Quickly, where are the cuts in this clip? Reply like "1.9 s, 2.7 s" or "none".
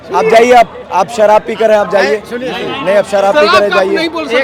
none